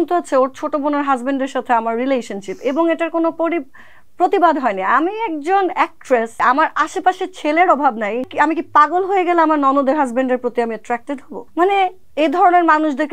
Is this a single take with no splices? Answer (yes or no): no